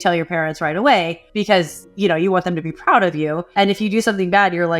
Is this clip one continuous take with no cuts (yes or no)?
no